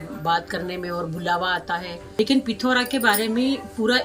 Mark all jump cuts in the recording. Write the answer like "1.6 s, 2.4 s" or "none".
2.0 s